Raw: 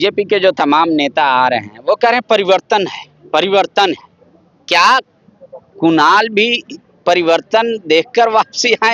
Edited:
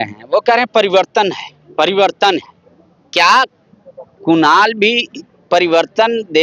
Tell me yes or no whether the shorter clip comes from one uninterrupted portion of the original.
yes